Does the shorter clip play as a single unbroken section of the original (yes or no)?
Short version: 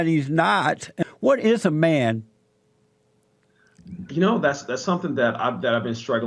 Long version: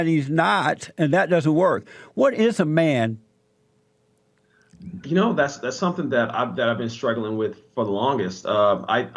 no